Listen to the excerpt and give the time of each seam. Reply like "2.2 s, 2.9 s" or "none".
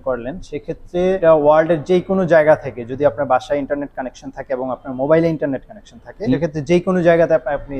1.2 s, 6.4 s

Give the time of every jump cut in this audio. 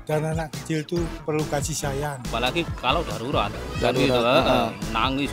2.2 s

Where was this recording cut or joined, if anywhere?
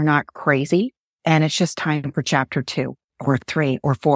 1.1 s, 3.1 s

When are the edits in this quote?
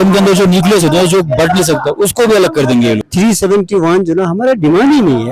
3.1 s

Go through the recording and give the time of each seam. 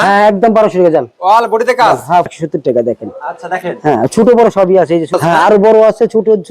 2.3 s, 5.1 s

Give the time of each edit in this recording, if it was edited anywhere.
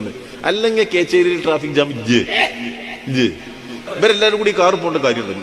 3.9 s

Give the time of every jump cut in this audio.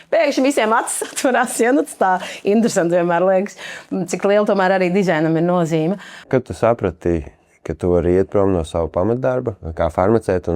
6.2 s, 9.6 s

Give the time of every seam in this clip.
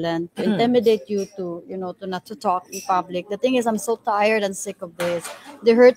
none

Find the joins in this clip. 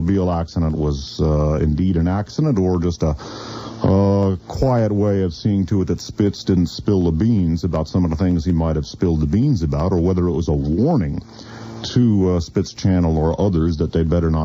1.7 s

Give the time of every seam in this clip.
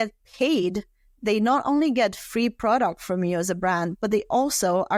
none

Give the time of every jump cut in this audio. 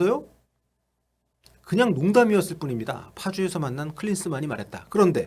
none

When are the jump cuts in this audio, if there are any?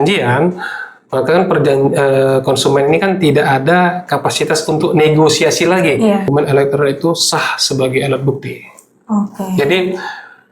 6.3 s

